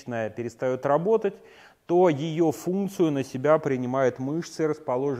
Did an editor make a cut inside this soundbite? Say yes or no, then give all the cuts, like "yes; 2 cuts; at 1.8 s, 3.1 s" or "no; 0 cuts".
no; 0 cuts